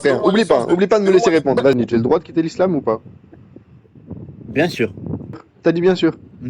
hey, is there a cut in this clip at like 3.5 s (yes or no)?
no